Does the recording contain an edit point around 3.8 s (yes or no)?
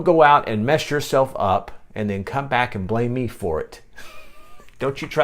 no